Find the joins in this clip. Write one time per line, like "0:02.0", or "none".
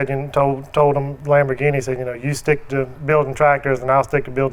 none